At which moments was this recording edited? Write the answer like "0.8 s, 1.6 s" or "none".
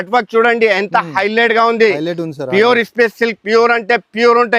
none